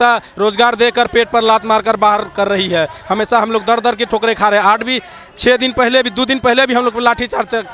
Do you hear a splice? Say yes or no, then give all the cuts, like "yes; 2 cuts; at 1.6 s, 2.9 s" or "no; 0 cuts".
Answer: no; 0 cuts